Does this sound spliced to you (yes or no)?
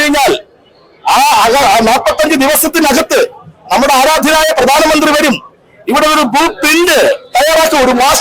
no